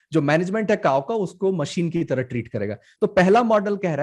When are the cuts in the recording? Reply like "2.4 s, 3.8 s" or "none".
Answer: none